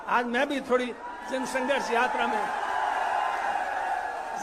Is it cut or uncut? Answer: uncut